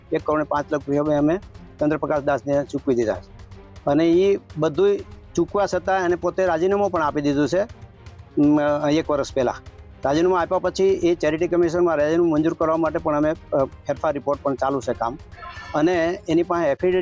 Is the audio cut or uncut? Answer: uncut